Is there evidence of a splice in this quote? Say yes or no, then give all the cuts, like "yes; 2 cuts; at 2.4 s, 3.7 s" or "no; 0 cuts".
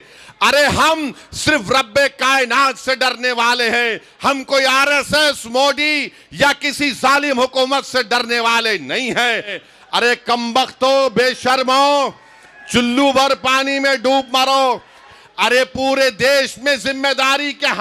yes; 2 cuts; at 9.6 s, 15.1 s